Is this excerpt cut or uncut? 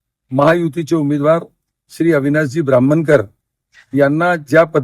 uncut